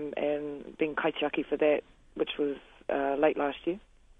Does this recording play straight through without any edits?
yes; 0 cuts

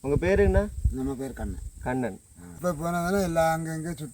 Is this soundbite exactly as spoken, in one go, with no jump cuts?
no; 1 cut; at 2.6 s

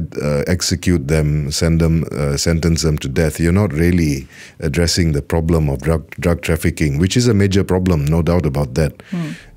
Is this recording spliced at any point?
no; 0 cuts

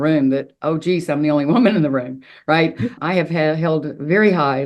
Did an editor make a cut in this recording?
yes; 1 cut; at 3.0 s

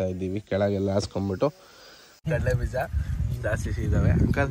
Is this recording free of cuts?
no; 1 cut; at 2.1 s

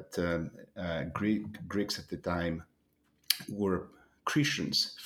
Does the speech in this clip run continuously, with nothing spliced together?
yes; 0 cuts

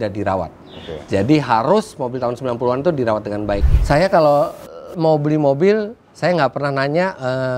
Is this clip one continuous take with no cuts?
no; 1 cut; at 3.6 s

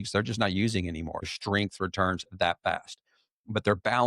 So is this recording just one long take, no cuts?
no; 1 cut; at 1.3 s

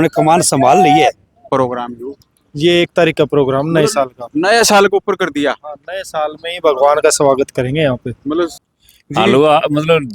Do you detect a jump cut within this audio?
yes; 2 cuts; at 1.5 s, 8.6 s

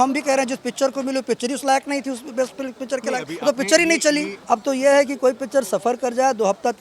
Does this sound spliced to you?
yes; 1 cut; at 4.3 s

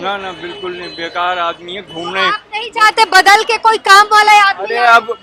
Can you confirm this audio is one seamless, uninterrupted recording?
yes; 0 cuts

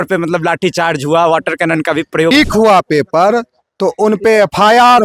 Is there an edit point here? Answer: yes; 1 cut; at 2.3 s

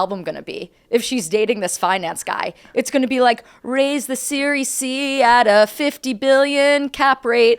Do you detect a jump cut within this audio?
no; 0 cuts

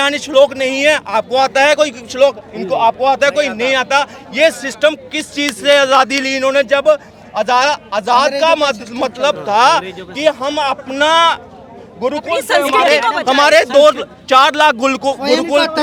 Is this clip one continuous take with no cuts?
yes; 0 cuts

